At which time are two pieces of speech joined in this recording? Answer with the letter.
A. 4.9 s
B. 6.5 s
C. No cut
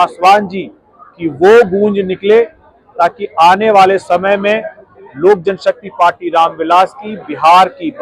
C